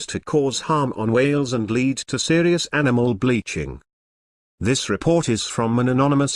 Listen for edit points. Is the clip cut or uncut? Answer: uncut